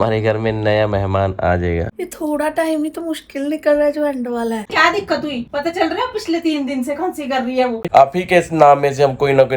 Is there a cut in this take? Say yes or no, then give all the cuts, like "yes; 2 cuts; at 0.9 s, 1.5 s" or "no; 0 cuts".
yes; 3 cuts; at 2.0 s, 4.7 s, 7.8 s